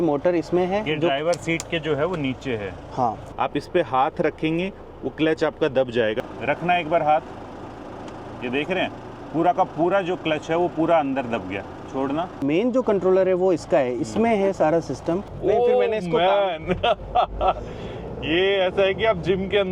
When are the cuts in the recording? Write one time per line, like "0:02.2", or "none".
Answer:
0:03.3
0:06.2
0:12.4
0:15.3